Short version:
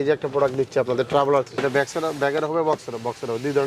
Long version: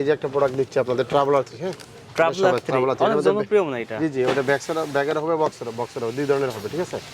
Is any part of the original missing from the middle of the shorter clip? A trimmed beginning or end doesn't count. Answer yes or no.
yes